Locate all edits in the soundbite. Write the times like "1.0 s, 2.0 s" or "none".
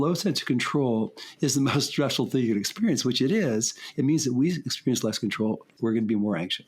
5.7 s